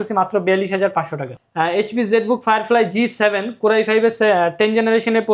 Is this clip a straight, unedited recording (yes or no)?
no